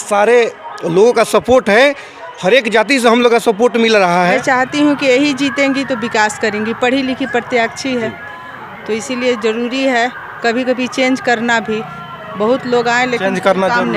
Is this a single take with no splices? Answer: no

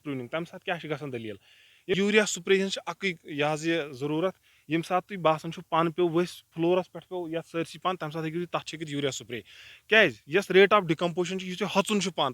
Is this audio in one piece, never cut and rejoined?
no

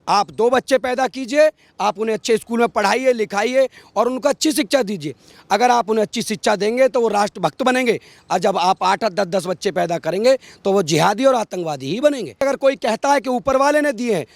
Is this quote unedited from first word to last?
no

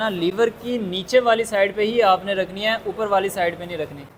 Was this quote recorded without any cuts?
yes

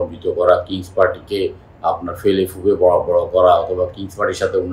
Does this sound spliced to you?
no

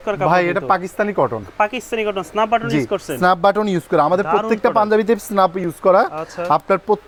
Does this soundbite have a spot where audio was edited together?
no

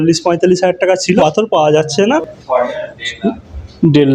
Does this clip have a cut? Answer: yes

